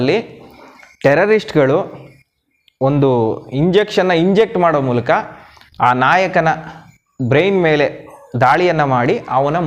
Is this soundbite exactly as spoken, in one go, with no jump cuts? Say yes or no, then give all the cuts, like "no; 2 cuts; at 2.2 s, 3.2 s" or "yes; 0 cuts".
yes; 0 cuts